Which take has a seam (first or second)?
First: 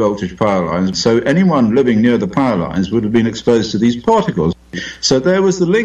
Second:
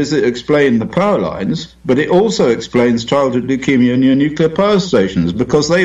first